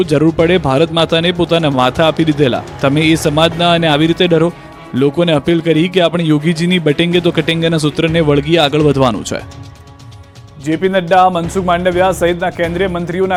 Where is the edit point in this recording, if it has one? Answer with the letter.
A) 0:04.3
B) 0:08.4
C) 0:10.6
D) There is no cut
D